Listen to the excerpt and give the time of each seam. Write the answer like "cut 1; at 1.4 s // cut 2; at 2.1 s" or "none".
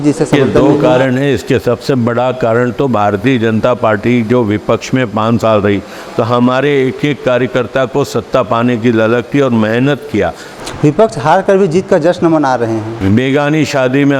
cut 1; at 10.5 s // cut 2; at 12.9 s